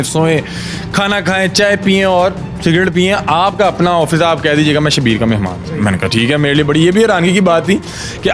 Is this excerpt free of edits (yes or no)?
yes